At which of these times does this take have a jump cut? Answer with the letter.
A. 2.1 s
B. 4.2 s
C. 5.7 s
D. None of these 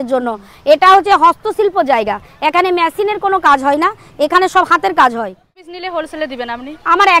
C